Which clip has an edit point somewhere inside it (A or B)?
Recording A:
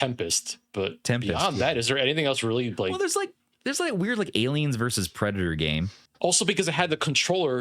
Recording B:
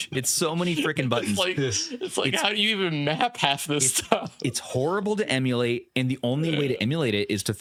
A